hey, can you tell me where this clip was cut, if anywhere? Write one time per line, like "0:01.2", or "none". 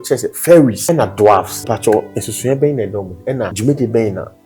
0:00.8
0:01.5
0:03.5